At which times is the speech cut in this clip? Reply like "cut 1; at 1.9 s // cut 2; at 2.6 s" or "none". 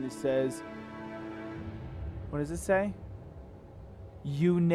none